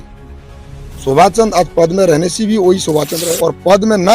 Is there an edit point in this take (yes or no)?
yes